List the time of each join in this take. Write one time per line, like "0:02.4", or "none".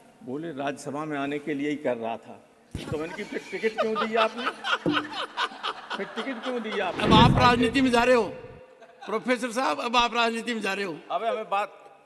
0:07.0